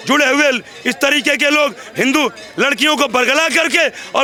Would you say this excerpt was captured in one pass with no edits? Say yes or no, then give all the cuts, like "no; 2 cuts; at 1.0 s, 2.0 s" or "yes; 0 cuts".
yes; 0 cuts